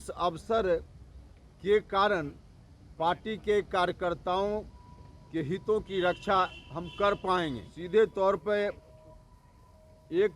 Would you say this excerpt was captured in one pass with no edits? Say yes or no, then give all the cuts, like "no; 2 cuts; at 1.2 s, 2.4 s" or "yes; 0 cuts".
no; 1 cut; at 7.7 s